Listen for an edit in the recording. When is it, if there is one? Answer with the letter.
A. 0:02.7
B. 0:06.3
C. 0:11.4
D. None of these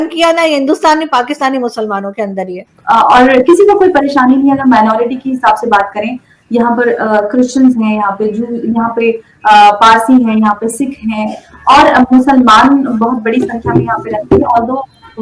A